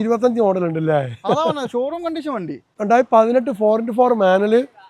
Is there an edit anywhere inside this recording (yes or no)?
yes